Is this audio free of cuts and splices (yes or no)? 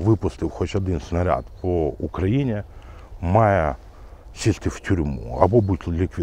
yes